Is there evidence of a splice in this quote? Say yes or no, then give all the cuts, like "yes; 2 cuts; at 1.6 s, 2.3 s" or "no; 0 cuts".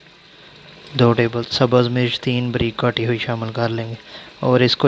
yes; 1 cut; at 1.4 s